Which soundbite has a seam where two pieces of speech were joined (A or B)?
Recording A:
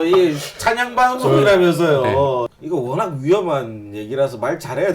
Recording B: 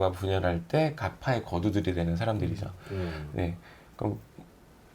A